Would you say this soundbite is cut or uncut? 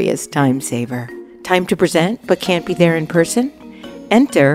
uncut